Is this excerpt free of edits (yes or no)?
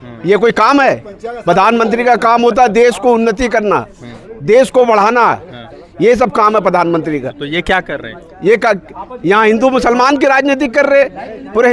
yes